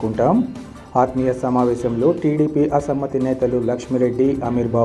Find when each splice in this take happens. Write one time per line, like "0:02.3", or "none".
none